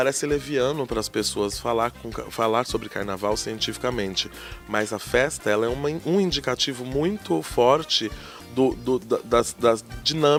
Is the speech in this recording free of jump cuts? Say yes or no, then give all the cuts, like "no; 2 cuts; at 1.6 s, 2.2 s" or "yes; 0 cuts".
yes; 0 cuts